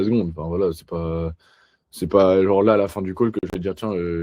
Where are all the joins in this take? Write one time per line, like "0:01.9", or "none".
none

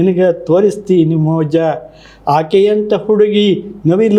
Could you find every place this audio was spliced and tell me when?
none

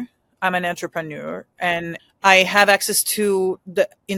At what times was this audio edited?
0:01.9

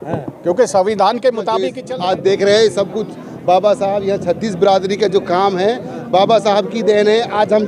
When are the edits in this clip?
0:01.8

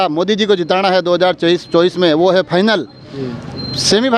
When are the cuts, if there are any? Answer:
none

